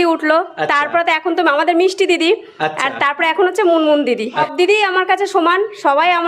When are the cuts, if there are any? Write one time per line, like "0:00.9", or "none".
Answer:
0:04.5